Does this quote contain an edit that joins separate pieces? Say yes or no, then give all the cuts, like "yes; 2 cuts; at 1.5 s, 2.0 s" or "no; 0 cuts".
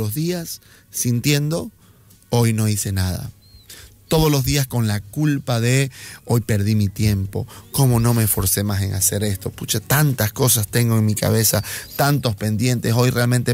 no; 0 cuts